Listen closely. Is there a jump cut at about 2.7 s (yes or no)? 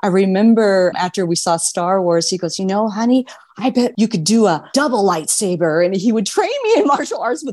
no